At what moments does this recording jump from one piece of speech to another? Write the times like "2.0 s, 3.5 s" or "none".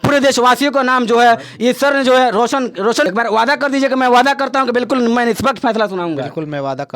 3.0 s